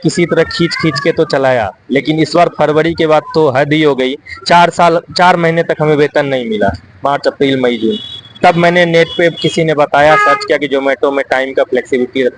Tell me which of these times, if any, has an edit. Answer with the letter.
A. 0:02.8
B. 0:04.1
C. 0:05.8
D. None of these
D